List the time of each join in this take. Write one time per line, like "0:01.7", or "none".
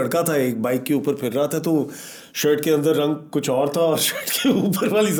none